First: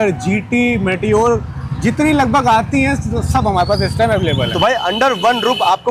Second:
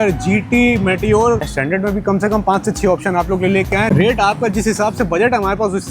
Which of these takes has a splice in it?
second; 2 cuts; at 1.5 s, 3.9 s

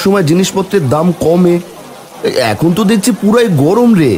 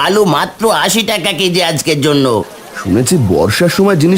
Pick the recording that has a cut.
second; 1 cut; at 2.6 s

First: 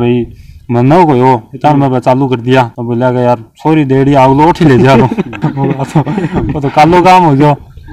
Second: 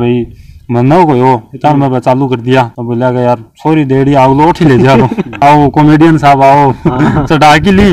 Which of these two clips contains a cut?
second; 1 cut; at 5.4 s

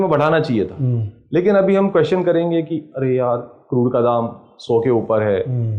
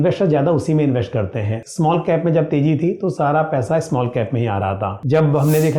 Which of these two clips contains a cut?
second; 2 cuts; at 1.5 s, 5.0 s

